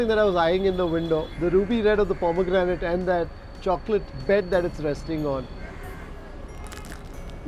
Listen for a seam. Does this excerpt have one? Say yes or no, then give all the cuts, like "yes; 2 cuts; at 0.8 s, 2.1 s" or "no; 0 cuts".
no; 0 cuts